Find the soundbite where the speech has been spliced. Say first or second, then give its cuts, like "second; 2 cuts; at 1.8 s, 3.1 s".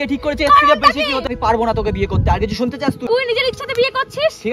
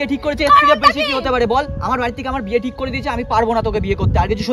first; 2 cuts; at 1.3 s, 3.1 s